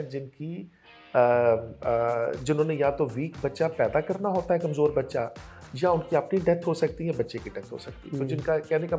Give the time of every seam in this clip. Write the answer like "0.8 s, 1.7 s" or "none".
none